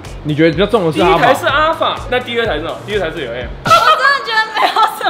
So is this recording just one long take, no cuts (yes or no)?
no